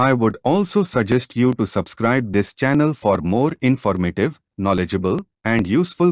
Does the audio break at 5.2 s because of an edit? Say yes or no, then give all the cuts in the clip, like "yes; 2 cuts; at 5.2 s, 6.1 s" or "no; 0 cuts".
no; 1 cut; at 4.0 s